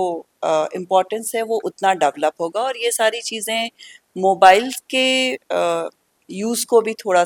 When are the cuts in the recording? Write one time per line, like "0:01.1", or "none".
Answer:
none